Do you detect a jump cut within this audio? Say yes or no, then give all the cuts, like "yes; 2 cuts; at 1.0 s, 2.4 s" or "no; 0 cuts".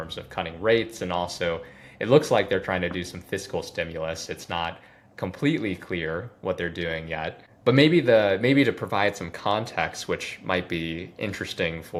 no; 0 cuts